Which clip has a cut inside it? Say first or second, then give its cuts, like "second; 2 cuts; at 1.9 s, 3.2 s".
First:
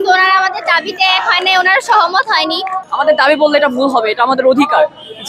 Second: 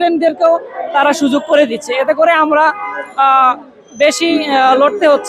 first; 1 cut; at 2.8 s